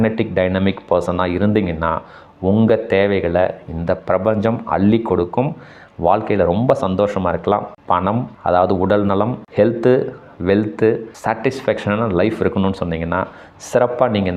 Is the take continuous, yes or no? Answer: yes